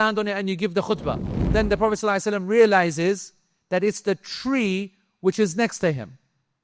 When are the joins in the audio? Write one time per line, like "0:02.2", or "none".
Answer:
0:01.3